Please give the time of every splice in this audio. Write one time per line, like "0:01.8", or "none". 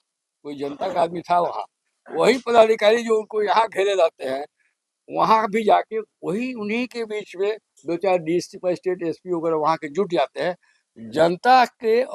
none